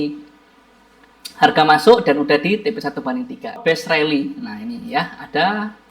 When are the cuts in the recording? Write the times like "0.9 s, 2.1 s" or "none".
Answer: 3.6 s